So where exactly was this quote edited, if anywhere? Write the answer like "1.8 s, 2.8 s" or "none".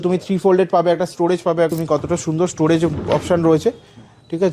1.7 s